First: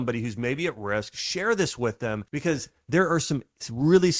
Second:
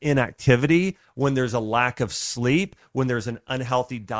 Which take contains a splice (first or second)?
first